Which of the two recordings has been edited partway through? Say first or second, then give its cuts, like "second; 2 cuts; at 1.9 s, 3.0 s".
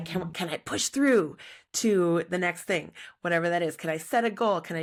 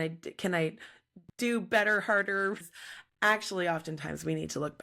second; 1 cut; at 2.6 s